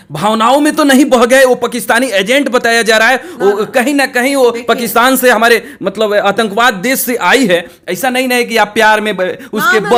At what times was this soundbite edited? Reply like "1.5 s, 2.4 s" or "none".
none